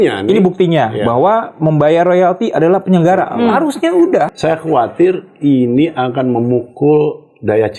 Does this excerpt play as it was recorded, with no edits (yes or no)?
no